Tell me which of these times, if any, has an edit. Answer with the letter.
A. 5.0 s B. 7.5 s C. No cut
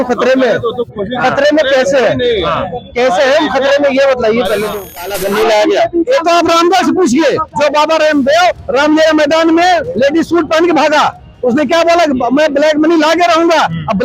A